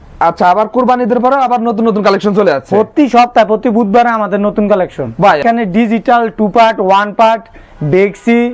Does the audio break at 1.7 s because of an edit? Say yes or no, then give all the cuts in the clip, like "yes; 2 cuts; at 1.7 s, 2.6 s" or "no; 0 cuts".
no; 1 cut; at 5.4 s